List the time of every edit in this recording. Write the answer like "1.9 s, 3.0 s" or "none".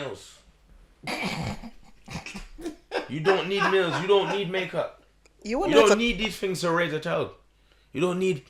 none